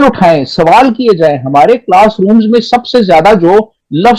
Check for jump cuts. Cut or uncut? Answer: uncut